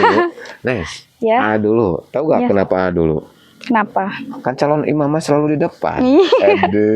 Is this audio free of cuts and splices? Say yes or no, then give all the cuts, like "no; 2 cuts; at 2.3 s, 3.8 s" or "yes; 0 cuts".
yes; 0 cuts